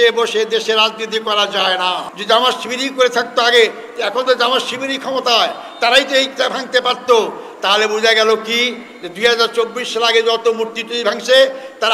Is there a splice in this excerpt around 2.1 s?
yes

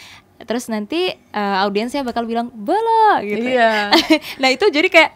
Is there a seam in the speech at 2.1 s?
no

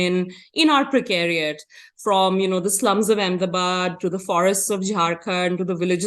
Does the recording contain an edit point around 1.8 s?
no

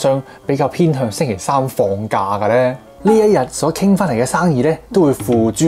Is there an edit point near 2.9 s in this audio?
yes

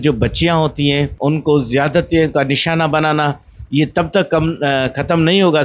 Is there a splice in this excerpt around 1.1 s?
yes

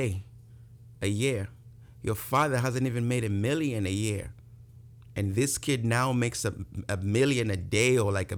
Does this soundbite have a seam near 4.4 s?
no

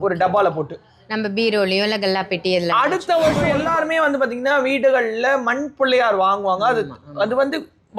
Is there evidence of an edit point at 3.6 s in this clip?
yes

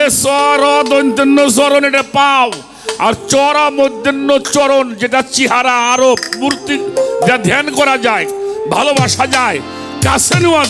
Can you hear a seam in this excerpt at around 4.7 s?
no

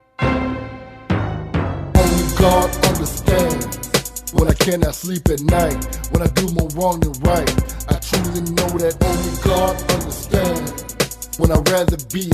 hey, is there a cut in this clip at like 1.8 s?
yes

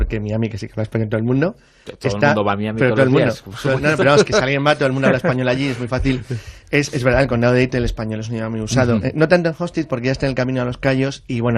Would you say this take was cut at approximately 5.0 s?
yes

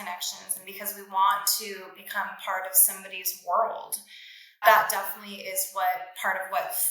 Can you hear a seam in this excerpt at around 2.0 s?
no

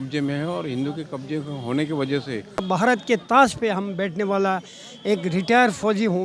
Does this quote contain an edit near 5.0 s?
no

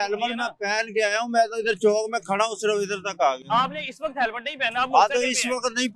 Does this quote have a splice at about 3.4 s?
no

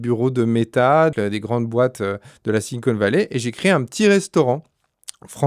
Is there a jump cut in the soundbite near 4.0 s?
no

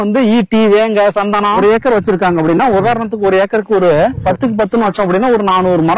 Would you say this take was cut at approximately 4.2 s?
yes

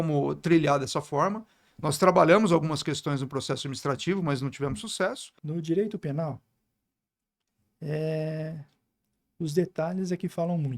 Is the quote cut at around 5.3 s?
yes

